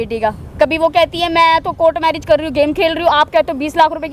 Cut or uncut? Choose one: uncut